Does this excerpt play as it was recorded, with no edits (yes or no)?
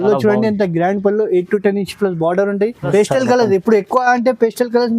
no